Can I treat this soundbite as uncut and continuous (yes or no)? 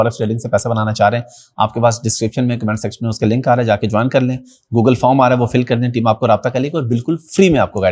yes